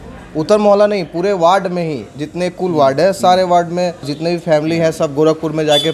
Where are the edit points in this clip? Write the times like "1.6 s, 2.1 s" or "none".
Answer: 4.1 s